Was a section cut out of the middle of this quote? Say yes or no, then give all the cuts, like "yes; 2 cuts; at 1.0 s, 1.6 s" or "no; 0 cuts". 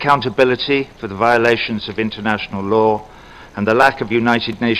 yes; 1 cut; at 3.5 s